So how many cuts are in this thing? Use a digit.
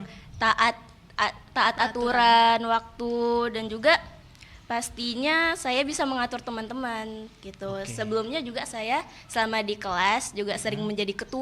0